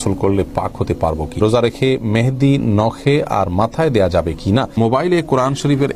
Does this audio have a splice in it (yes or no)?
yes